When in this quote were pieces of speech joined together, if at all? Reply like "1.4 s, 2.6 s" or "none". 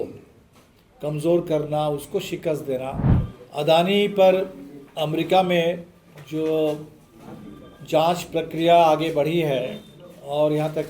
3.1 s